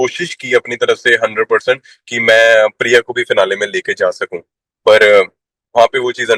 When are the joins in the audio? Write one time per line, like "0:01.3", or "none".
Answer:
none